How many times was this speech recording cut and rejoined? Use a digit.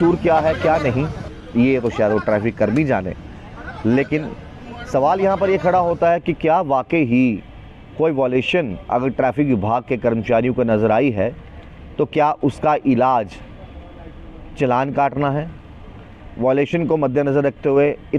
0